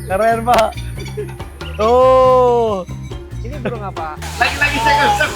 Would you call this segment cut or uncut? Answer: cut